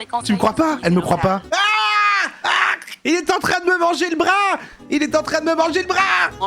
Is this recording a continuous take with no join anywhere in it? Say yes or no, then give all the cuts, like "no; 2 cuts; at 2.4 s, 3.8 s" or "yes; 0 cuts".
no; 2 cuts; at 1.4 s, 2.9 s